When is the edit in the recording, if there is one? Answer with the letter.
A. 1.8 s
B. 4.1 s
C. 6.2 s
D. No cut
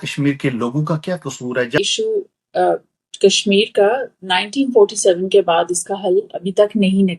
A